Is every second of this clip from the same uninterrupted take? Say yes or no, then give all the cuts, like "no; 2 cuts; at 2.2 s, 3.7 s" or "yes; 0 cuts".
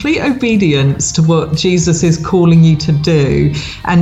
yes; 0 cuts